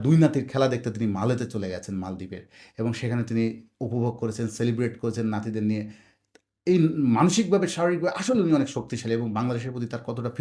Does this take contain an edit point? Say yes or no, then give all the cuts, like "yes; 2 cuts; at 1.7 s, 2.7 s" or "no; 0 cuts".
no; 0 cuts